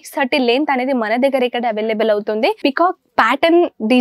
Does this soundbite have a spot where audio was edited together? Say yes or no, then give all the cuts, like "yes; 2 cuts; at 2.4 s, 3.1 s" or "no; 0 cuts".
yes; 1 cut; at 2.6 s